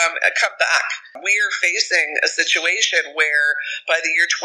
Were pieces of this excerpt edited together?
yes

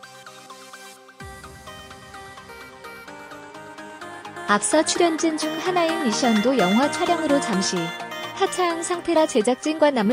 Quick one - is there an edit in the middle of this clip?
yes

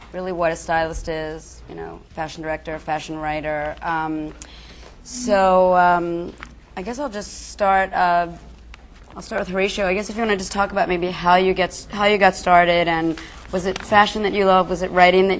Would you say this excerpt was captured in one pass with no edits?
yes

